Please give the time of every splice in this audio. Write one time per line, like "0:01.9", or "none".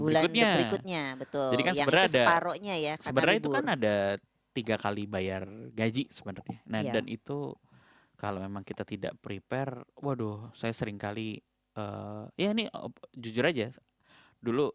none